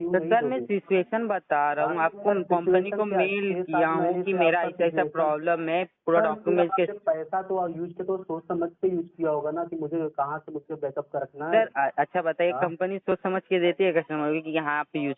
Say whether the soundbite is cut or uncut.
uncut